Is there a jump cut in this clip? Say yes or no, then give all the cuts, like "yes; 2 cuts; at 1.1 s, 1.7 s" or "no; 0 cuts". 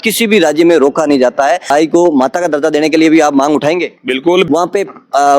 yes; 2 cuts; at 1.7 s, 4.5 s